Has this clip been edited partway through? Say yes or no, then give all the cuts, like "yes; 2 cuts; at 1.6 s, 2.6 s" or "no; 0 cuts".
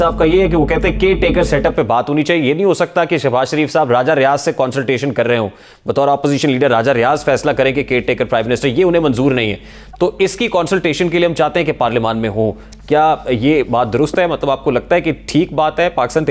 no; 0 cuts